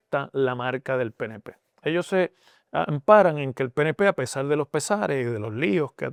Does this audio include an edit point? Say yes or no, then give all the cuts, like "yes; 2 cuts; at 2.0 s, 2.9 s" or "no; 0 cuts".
no; 0 cuts